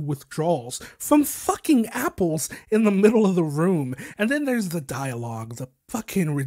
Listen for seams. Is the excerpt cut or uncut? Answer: uncut